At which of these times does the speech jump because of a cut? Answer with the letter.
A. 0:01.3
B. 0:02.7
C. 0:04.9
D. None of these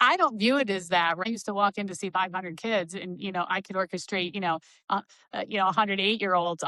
A